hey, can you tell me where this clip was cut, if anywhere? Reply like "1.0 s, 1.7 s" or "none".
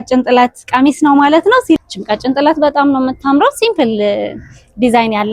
1.8 s